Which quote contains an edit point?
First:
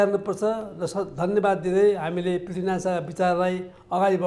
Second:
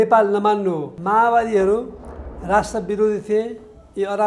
second; 1 cut; at 0.9 s

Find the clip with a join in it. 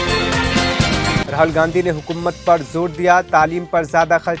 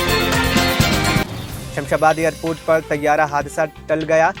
first; 1 cut; at 1.2 s

